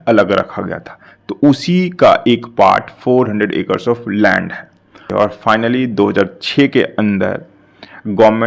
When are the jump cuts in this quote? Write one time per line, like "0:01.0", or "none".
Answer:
0:05.0